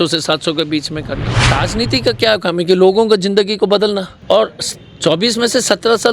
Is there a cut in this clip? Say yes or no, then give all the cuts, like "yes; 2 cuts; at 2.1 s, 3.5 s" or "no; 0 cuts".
yes; 2 cuts; at 1.4 s, 4.1 s